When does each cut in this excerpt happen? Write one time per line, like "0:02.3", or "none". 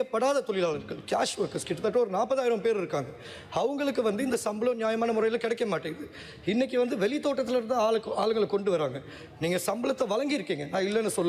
none